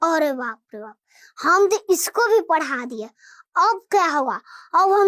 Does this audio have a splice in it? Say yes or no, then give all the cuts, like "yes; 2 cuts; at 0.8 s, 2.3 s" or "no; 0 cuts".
no; 0 cuts